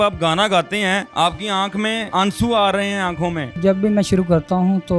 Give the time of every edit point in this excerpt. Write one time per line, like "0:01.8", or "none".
0:01.1
0:02.0
0:03.6

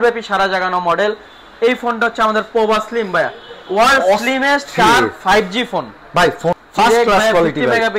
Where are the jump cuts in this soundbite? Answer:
0:06.6

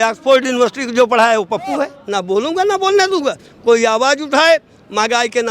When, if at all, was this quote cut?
0:02.0

